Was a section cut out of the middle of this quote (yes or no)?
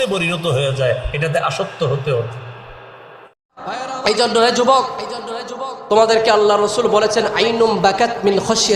yes